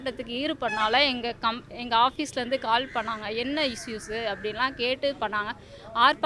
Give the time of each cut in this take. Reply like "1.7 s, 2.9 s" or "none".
none